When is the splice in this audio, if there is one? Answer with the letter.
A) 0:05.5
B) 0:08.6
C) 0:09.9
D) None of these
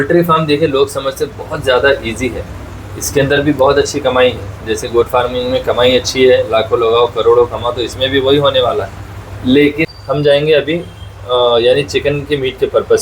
C